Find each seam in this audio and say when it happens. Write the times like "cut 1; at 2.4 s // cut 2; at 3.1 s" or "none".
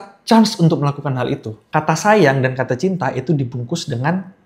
cut 1; at 1.6 s

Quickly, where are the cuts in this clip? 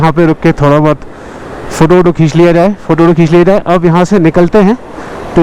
none

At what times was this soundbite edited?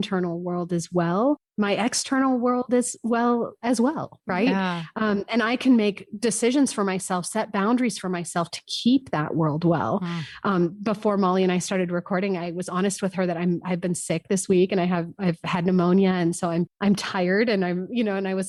none

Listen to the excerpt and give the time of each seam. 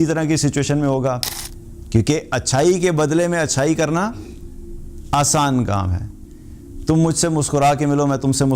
cut 1; at 1.4 s

